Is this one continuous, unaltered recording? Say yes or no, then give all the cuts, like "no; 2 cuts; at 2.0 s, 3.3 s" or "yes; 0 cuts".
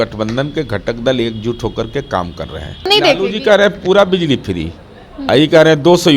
no; 1 cut; at 2.9 s